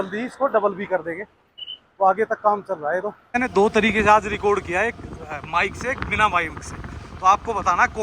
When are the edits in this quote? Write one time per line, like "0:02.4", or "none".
0:03.2